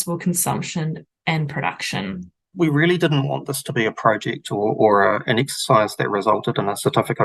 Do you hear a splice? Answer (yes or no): yes